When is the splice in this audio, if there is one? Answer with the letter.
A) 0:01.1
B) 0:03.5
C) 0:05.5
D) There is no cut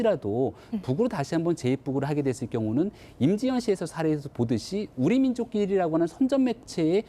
C